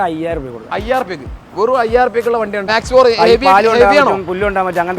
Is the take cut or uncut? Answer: cut